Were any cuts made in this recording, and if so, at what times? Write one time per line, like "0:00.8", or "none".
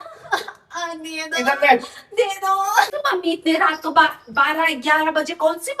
0:02.9